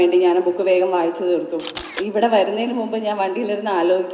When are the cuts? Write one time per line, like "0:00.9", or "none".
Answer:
0:01.8